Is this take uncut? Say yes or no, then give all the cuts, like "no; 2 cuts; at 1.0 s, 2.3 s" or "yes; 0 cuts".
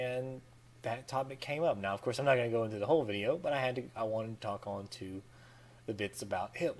yes; 0 cuts